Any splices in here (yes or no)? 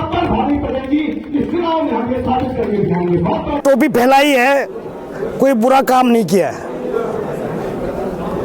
yes